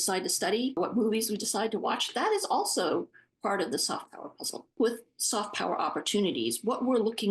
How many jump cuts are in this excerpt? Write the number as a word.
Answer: one